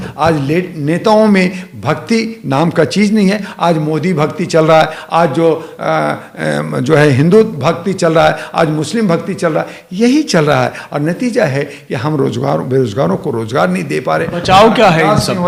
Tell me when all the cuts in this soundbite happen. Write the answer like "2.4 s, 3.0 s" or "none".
none